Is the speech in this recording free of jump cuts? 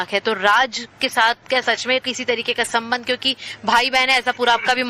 yes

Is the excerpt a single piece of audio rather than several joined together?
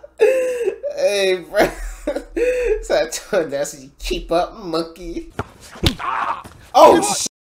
no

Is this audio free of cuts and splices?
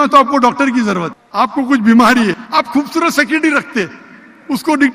no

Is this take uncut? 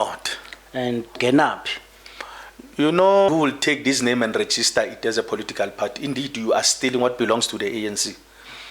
no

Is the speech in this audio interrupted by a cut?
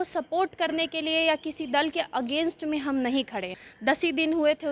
yes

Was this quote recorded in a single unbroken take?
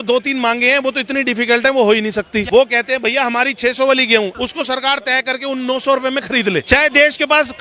no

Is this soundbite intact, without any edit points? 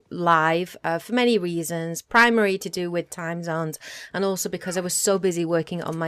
yes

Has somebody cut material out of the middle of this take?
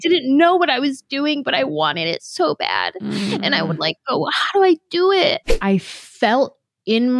yes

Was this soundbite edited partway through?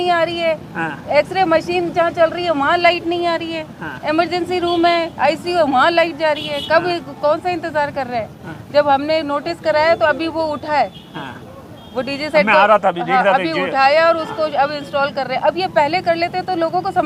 no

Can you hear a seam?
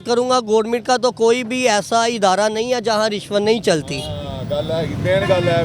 no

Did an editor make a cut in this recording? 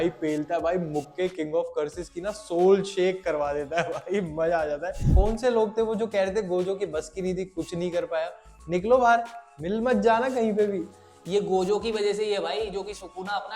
yes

